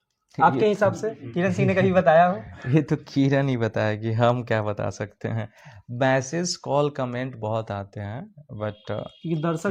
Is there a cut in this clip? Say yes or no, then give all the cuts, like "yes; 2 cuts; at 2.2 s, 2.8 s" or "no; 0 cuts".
no; 0 cuts